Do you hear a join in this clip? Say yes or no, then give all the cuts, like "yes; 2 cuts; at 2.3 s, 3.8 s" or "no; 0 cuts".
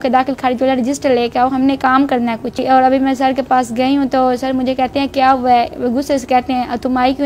yes; 1 cut; at 2.6 s